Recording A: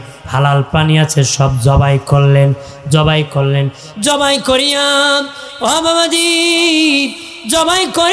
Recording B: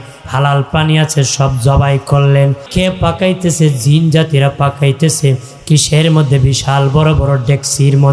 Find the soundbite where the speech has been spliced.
B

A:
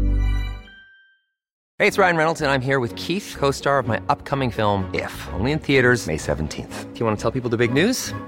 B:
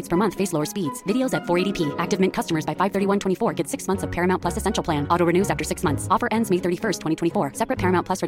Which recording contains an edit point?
A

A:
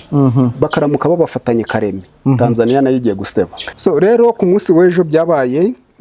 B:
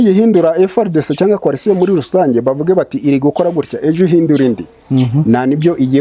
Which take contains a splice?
A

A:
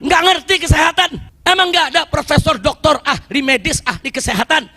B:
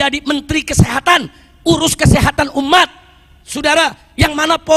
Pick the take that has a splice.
A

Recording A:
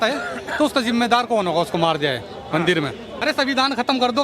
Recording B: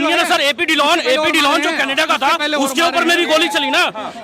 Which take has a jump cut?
A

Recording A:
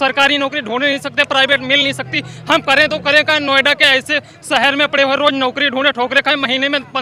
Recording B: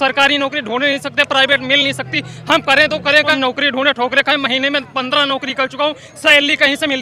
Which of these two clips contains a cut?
B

